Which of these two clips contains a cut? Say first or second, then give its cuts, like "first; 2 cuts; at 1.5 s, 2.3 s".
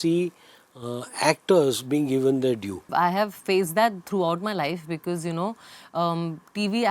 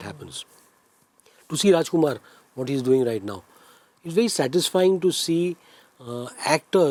first; 1 cut; at 2.9 s